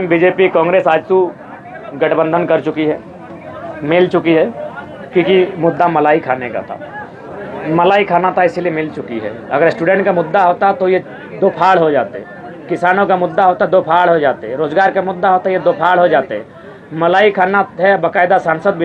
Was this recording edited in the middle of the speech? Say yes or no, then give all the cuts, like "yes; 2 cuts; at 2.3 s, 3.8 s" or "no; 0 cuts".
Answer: no; 0 cuts